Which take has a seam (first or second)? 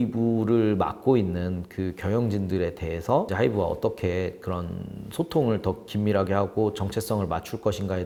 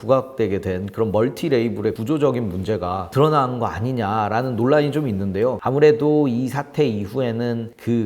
second